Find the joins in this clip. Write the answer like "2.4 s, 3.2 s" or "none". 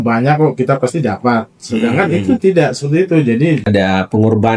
3.6 s